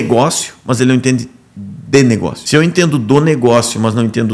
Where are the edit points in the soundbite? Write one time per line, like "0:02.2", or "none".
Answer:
0:02.4